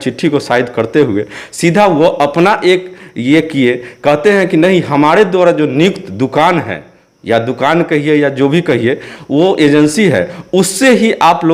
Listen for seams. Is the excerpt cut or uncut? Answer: uncut